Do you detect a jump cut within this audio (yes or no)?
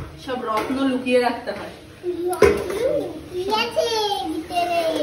yes